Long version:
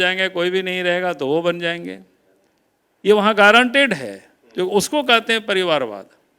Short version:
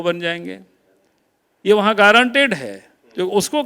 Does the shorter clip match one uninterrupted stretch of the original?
yes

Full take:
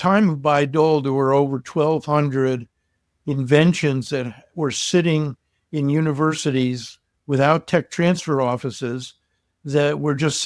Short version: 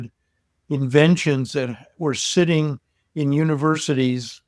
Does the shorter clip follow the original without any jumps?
yes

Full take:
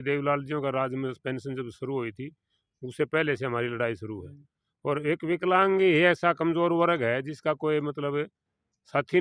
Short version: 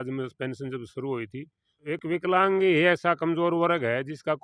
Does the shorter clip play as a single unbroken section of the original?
no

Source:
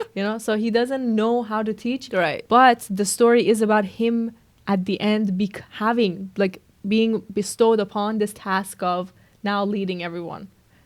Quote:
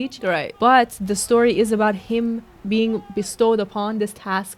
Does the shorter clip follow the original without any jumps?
no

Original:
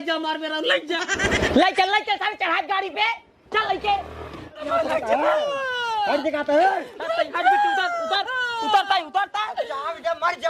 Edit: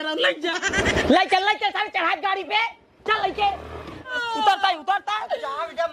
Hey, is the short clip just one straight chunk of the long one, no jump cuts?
no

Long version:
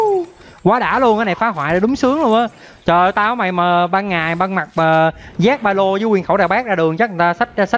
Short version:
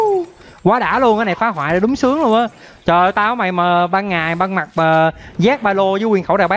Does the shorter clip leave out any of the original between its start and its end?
no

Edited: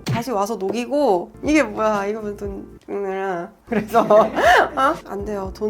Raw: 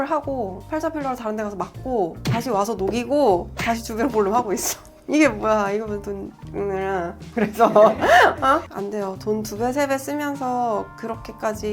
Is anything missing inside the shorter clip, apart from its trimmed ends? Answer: yes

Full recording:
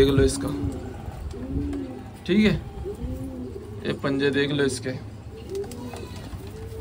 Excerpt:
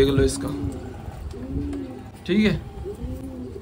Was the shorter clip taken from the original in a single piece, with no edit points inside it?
yes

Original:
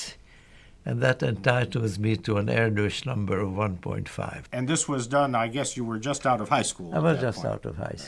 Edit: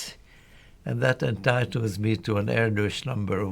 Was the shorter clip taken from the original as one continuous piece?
yes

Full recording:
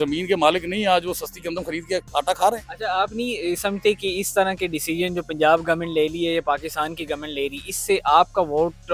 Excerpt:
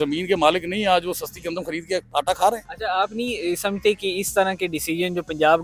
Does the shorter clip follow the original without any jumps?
yes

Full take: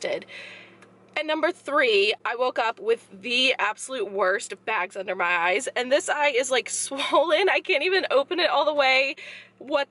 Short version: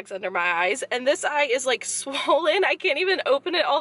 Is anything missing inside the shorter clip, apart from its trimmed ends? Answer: no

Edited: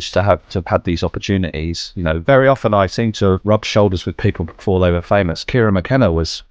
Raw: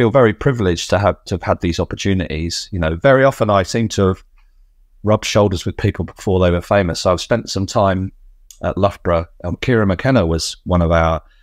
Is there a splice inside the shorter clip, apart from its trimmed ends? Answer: yes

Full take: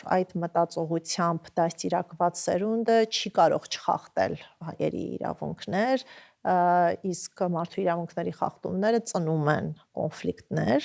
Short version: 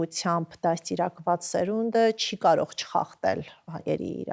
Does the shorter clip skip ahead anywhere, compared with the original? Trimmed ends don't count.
no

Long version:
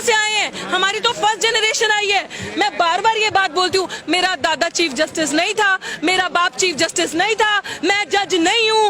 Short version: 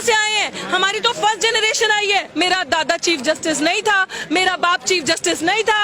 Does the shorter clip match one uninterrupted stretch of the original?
no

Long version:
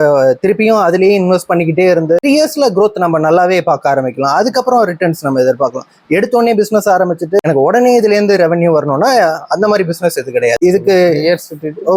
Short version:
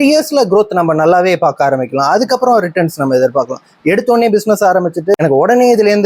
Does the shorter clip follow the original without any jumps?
yes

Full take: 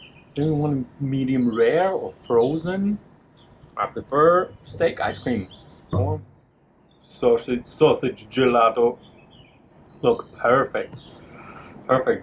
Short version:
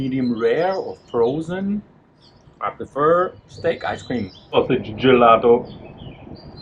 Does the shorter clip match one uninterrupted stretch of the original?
no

